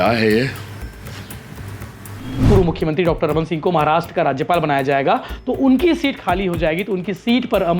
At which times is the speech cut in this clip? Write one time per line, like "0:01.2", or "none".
0:02.4